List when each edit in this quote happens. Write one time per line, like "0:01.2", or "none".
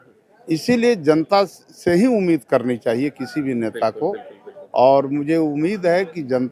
none